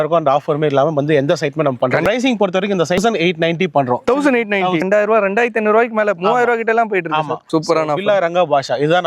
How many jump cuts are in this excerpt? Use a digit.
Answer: 4